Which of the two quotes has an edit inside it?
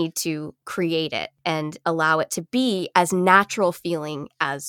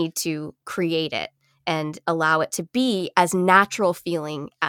first; 1 cut; at 1.3 s

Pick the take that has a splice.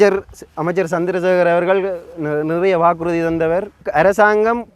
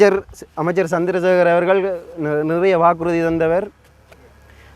first; 1 cut; at 3.8 s

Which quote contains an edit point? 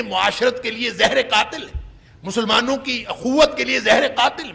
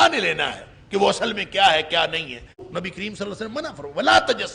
second; 1 cut; at 2.6 s

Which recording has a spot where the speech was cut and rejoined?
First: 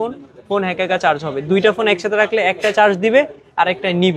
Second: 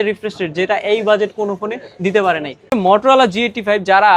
second; 1 cut; at 2.7 s

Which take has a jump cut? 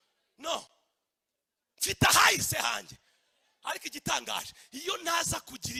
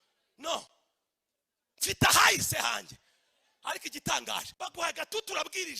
second; 1 cut; at 4.5 s

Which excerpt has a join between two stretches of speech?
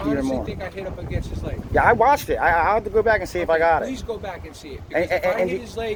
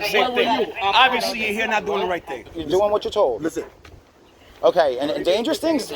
second; 1 cut; at 2.5 s

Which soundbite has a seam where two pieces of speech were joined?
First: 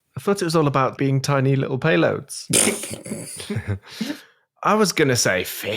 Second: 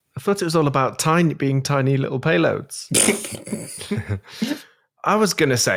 first; 1 cut; at 1.0 s

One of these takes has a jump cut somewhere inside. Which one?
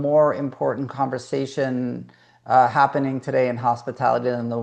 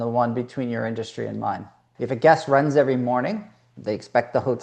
second; 1 cut; at 1.9 s

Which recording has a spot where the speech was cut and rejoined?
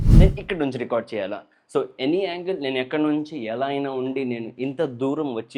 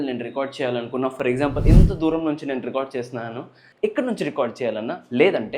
second; 1 cut; at 3.6 s

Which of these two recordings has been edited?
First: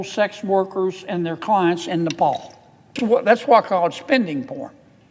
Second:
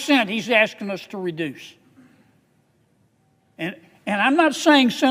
first; 1 cut; at 2.9 s

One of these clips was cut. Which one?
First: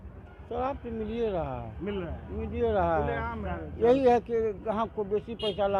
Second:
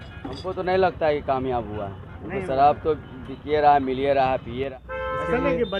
second; 1 cut; at 4.7 s

